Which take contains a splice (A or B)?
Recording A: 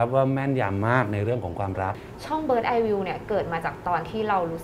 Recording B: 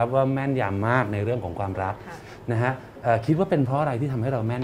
A